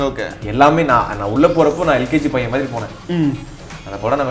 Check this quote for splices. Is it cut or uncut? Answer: uncut